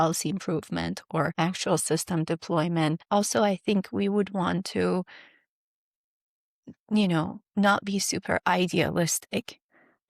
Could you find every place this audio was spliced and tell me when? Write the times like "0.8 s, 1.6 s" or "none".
1.3 s, 3.0 s